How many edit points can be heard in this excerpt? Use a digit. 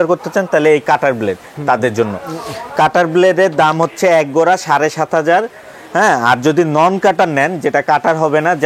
0